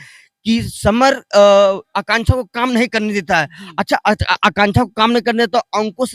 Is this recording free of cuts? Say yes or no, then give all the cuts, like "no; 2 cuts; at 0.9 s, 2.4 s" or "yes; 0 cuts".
yes; 0 cuts